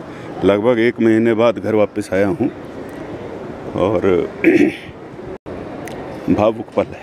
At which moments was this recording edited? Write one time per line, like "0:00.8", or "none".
0:05.6